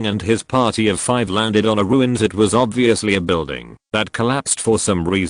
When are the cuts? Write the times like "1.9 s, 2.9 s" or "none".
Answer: 2.3 s